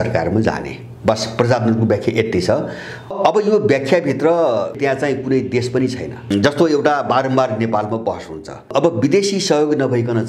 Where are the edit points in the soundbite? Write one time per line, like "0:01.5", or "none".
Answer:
0:03.1
0:04.8
0:06.3
0:08.7

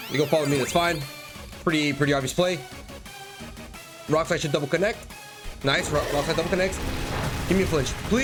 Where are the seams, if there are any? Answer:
none

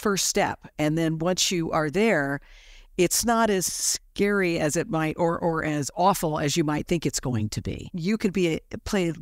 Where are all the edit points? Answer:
0:07.9

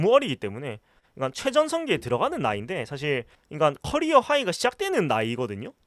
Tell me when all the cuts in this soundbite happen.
0:03.4

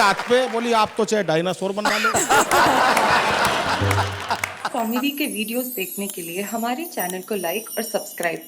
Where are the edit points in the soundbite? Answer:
0:04.6

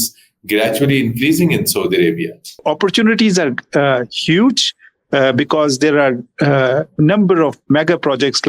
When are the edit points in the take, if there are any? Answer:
0:02.6

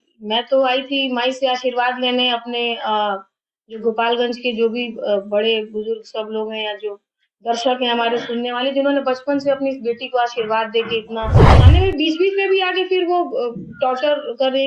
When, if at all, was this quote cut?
0:11.5

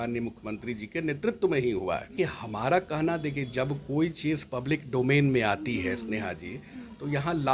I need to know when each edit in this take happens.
0:02.1

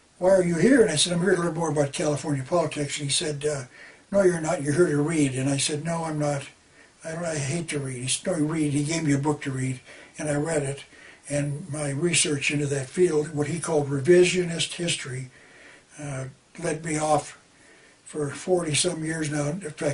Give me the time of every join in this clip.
0:06.0

